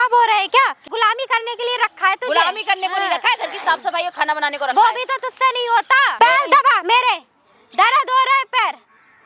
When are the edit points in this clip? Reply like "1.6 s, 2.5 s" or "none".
0.8 s, 6.1 s